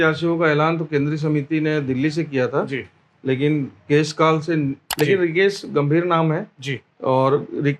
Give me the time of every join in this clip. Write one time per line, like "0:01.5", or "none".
0:04.9